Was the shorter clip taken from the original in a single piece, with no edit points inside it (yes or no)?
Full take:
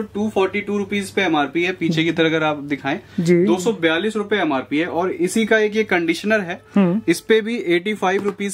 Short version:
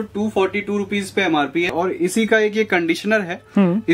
no